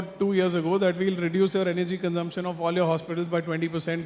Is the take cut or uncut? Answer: uncut